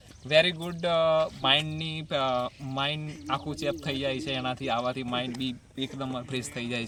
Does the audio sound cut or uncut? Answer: uncut